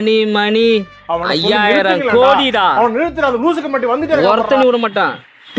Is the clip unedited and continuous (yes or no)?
yes